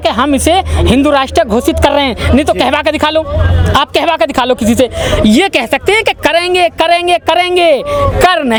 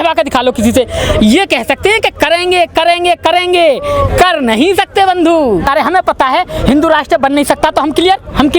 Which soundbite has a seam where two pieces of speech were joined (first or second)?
second